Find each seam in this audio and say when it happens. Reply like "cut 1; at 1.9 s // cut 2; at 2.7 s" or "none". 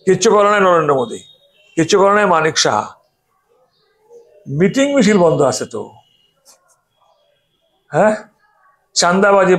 none